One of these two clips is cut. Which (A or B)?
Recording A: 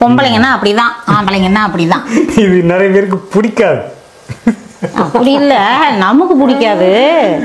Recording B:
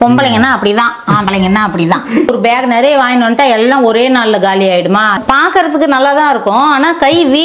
B